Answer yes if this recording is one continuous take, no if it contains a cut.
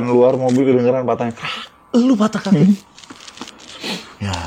yes